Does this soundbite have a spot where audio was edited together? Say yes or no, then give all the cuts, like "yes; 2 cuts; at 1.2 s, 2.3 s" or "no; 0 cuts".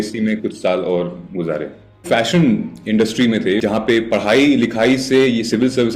yes; 2 cuts; at 2.0 s, 3.6 s